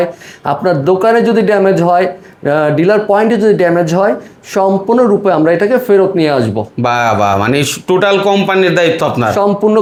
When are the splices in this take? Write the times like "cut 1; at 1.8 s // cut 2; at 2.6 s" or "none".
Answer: none